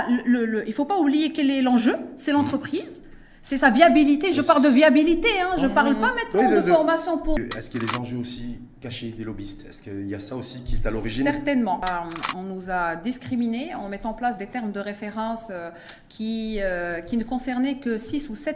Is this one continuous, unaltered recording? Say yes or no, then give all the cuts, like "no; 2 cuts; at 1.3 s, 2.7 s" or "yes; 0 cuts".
no; 2 cuts; at 7.4 s, 11.8 s